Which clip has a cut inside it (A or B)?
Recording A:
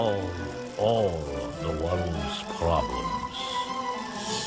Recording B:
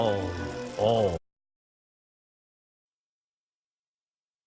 A